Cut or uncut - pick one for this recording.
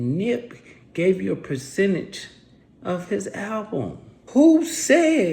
cut